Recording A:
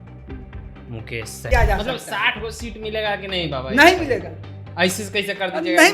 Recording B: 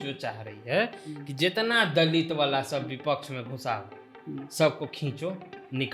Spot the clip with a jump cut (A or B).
A